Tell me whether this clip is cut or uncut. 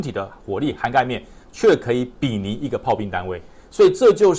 uncut